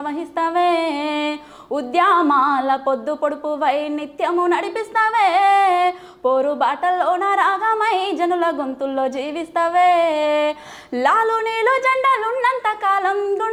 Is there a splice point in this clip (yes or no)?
no